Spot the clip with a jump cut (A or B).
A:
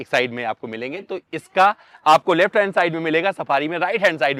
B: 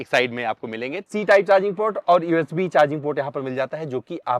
B